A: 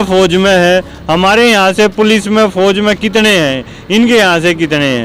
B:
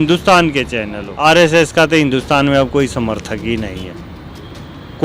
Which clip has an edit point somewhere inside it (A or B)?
B